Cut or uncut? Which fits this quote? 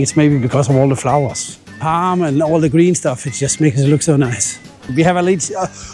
cut